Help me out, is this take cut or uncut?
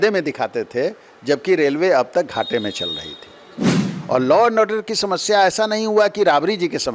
cut